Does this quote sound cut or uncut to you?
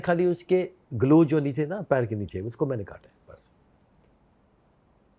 uncut